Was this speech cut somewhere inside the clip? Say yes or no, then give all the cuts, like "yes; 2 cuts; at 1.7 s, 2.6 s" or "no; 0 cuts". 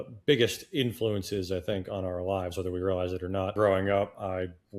yes; 1 cut; at 3.5 s